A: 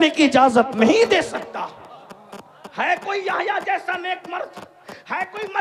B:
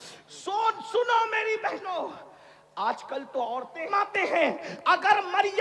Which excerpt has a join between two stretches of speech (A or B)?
B